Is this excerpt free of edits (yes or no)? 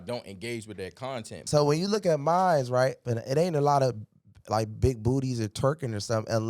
no